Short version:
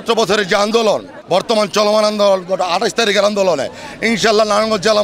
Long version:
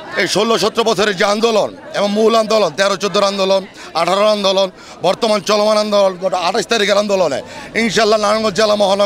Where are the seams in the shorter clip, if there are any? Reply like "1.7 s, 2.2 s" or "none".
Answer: 1.1 s

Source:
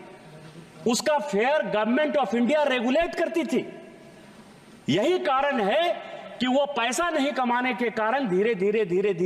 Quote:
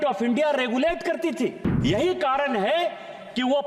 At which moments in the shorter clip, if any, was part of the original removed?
1.7 s

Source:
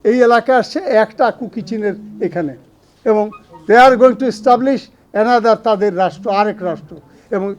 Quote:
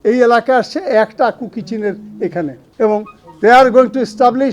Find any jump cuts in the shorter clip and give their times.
2.6 s

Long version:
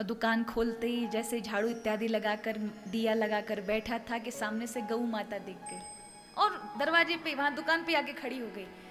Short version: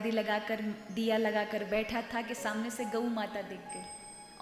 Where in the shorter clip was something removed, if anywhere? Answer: none

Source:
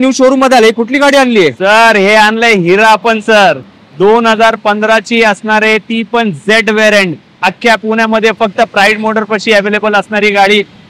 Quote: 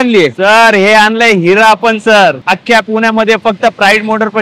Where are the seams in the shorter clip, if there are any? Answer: 2.5 s

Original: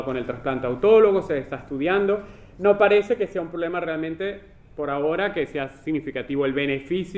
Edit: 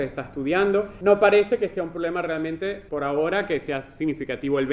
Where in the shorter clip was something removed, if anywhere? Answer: 0.9 s, 2.8 s

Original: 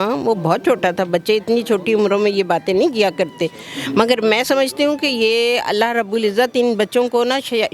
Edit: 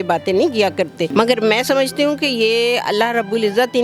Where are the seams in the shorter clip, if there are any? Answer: 1.1 s

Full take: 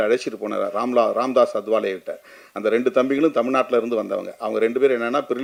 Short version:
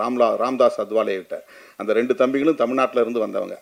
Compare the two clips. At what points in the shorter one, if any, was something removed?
none

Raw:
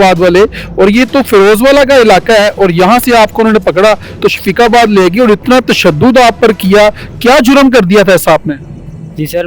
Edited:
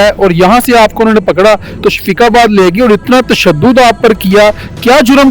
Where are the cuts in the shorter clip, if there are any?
none

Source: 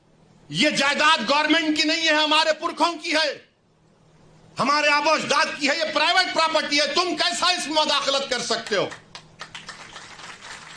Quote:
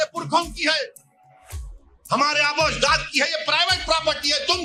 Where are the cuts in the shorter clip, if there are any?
none

